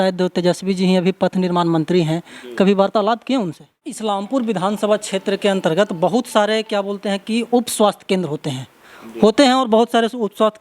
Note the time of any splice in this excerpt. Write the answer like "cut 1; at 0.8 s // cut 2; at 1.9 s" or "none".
cut 1; at 4.0 s